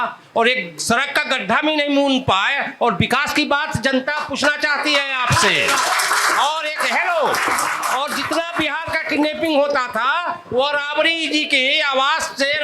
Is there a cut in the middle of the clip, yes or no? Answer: no